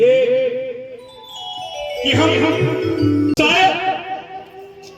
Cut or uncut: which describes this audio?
cut